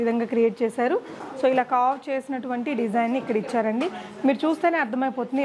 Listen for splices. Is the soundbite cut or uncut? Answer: cut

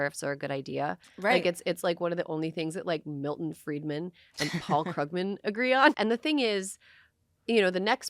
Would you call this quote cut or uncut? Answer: cut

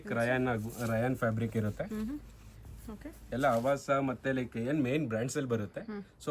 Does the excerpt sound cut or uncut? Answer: uncut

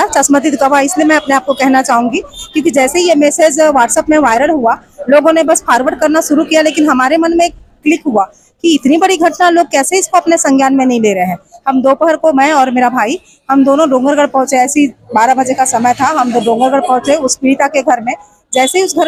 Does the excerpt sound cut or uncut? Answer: uncut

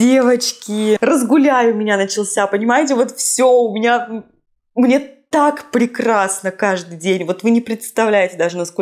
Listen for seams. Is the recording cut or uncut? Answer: cut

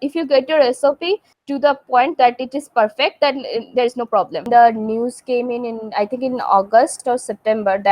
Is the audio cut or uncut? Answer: cut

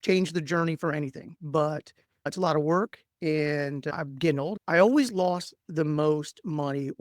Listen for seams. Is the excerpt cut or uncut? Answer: cut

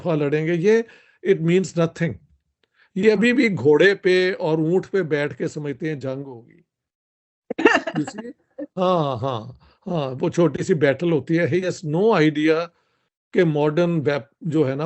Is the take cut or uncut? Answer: uncut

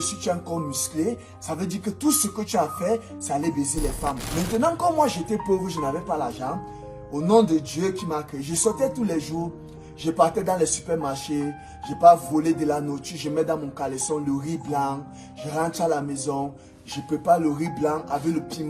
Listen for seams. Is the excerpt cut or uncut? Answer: cut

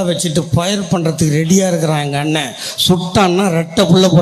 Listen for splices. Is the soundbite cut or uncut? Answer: uncut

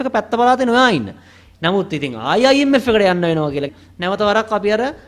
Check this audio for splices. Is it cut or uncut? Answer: cut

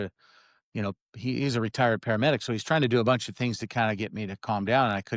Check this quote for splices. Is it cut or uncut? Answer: uncut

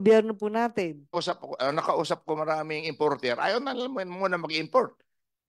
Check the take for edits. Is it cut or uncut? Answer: cut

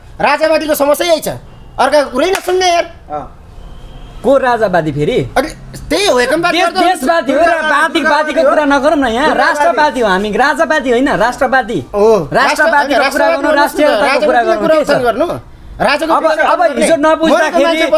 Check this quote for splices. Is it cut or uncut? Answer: uncut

